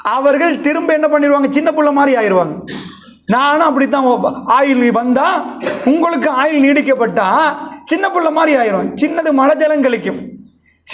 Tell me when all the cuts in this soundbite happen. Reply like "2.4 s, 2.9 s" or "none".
none

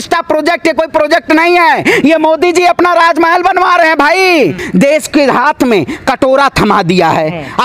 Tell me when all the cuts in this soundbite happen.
4.6 s

